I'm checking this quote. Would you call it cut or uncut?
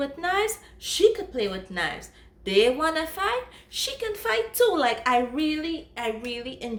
uncut